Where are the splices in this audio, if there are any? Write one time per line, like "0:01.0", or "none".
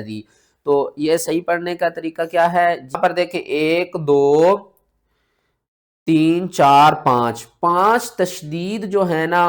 0:03.0